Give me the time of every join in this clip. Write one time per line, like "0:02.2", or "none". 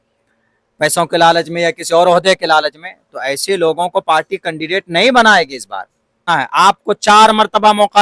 0:06.2

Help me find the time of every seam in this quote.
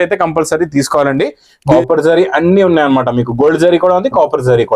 0:01.7

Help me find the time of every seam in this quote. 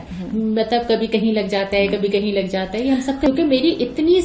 0:03.3

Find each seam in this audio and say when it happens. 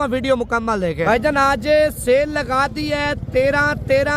0:01.0

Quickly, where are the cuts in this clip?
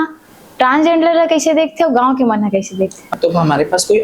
0:03.1

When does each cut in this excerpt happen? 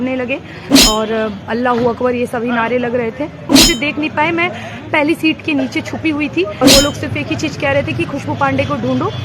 0:03.5
0:06.6

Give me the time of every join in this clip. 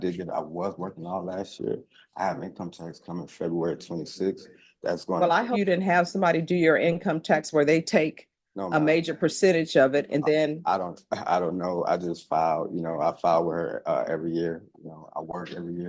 0:05.5

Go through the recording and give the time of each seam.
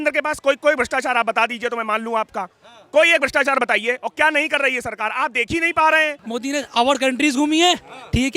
0:06.2

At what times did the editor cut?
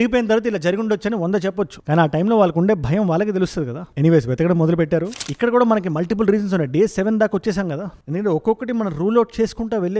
0:05.2

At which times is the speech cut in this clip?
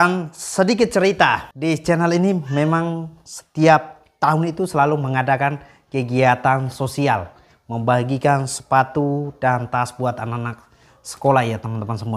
0:01.5

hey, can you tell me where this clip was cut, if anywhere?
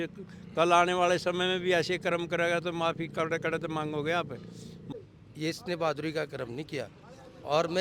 0:04.8

